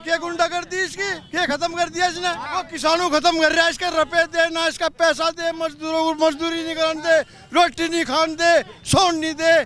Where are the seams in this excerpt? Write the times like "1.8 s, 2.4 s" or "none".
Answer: 2.4 s